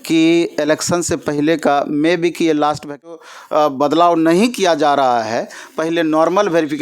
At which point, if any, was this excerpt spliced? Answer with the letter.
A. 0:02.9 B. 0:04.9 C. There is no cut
A